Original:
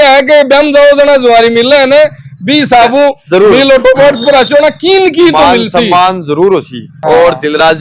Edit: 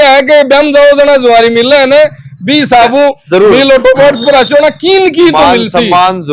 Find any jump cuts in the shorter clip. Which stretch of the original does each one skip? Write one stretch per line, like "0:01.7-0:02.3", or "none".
none

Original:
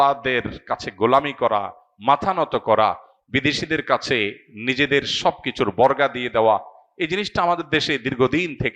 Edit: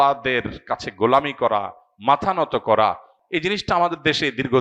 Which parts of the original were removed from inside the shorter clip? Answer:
0:03.1-0:06.8

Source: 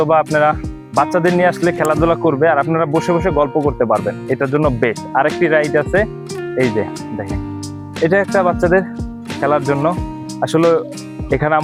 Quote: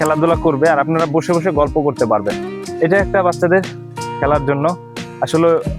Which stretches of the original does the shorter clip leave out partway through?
0:04.2-0:07.6

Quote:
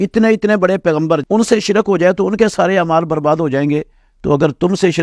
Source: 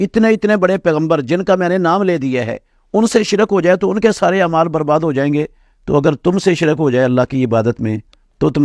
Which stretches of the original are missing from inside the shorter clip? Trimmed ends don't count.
0:01.2-0:02.9

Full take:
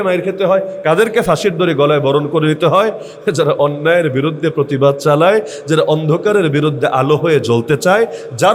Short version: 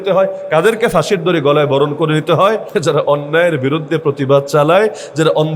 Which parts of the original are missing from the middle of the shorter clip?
0:03.0-0:03.2

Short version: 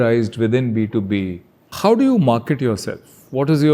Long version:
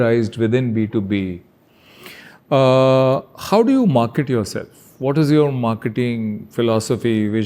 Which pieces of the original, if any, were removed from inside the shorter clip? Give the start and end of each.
0:01.7-0:03.3

